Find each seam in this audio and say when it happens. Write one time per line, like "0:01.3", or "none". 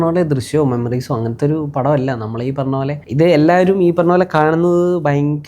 0:03.0